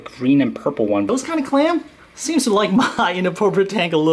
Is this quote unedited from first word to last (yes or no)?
no